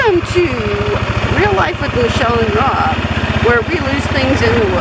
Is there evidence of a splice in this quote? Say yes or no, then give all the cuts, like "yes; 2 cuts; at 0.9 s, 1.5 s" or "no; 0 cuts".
no; 0 cuts